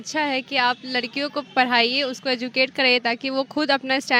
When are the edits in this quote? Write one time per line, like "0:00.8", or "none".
none